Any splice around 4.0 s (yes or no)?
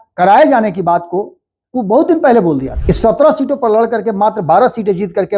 no